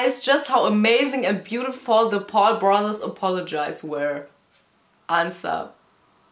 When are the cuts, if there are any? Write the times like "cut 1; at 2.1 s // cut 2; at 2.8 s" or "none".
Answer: none